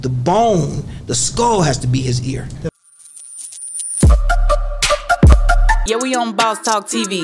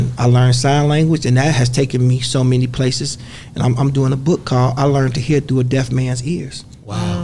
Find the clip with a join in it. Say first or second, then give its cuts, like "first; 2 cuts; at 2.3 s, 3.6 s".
first; 1 cut; at 2.7 s